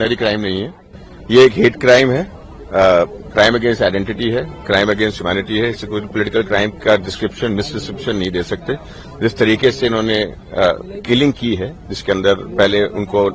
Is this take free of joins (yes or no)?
yes